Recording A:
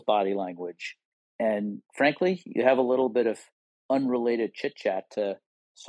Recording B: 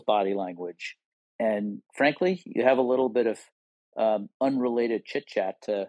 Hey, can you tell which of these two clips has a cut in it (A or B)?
A